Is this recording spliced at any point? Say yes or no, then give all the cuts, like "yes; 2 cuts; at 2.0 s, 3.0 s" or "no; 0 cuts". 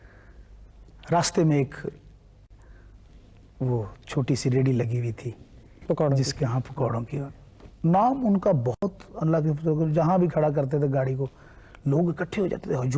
no; 0 cuts